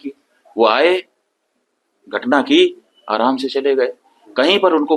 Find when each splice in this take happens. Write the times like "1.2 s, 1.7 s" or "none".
none